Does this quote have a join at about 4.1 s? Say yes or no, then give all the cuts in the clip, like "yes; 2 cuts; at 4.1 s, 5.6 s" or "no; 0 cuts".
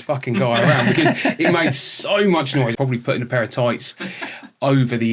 no; 1 cut; at 2.7 s